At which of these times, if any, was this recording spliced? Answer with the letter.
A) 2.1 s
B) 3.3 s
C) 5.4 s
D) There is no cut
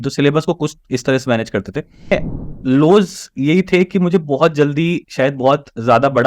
A